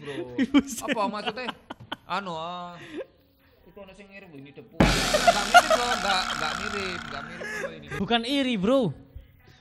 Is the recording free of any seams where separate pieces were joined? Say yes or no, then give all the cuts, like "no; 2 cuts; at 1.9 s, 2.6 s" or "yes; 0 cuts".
no; 1 cut; at 8.0 s